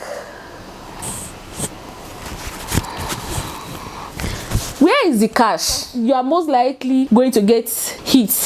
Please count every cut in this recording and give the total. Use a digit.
1